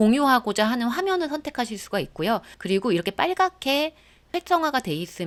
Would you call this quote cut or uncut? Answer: uncut